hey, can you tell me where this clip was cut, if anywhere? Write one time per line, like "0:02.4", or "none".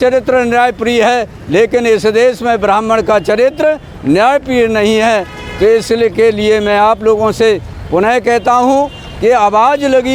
none